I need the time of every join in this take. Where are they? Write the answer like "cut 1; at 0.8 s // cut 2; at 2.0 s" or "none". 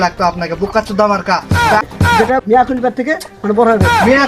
cut 1; at 1.9 s